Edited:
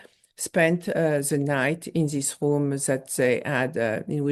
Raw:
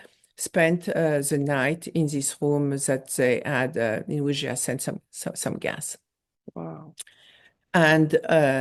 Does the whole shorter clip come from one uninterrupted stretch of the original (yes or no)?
yes